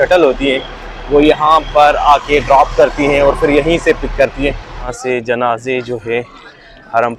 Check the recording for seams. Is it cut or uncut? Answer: cut